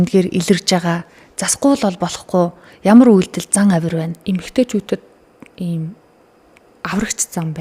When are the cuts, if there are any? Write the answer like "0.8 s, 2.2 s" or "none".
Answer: 4.1 s

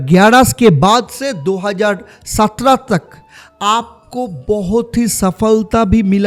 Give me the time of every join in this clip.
none

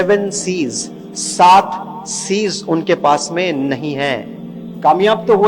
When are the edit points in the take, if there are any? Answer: none

